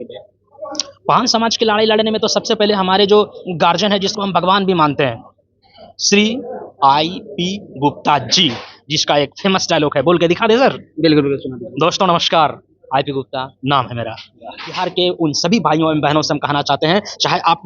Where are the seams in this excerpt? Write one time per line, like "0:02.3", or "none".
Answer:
0:14.7